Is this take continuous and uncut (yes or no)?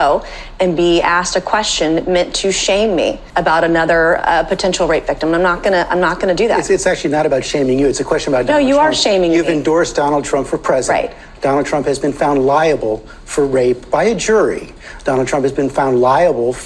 no